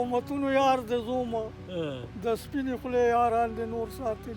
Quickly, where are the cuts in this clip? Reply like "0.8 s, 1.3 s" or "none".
none

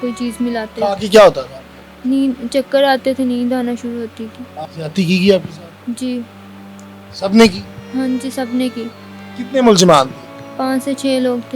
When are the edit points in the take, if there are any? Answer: 4.5 s

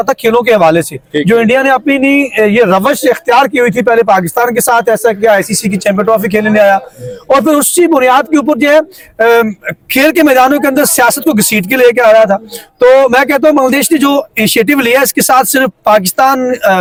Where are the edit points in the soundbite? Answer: none

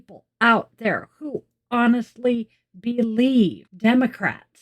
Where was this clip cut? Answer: 3.7 s

